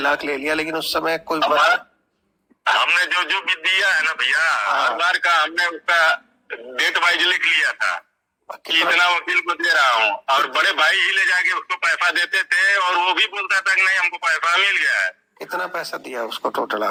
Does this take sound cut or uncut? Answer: uncut